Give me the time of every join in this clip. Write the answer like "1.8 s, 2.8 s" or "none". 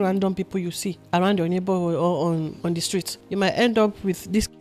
0.9 s, 2.8 s